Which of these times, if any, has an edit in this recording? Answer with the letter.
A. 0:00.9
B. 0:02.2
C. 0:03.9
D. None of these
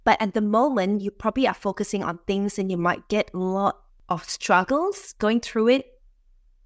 C